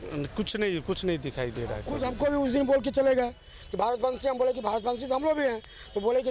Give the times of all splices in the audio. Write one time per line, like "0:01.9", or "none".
0:02.0